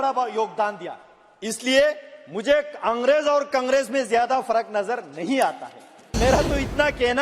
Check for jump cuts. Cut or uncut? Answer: cut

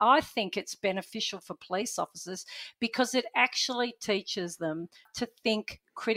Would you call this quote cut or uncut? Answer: cut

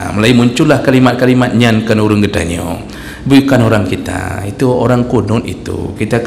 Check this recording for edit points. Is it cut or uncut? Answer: uncut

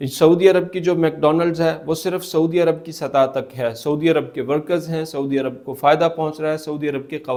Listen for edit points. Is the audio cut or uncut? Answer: uncut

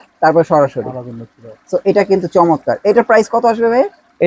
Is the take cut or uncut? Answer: uncut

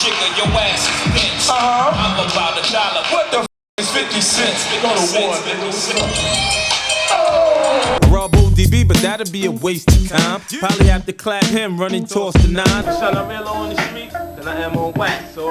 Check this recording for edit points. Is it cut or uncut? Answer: cut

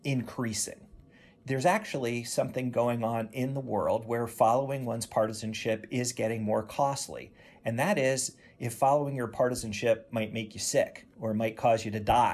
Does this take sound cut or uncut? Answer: cut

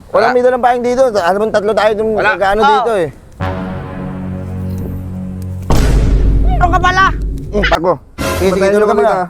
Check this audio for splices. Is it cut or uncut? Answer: cut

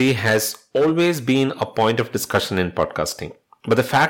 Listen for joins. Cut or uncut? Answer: uncut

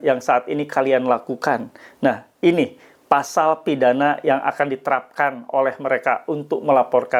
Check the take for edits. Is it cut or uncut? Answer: uncut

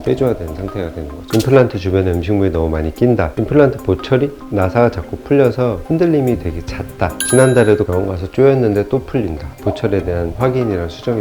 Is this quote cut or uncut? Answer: cut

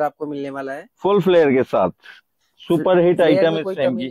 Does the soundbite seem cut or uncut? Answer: uncut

